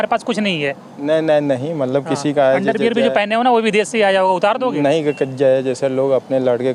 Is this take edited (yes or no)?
no